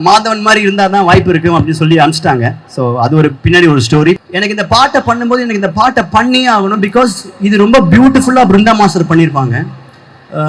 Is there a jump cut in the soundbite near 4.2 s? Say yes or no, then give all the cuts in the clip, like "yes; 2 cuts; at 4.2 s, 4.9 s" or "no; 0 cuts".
yes; 1 cut; at 4.2 s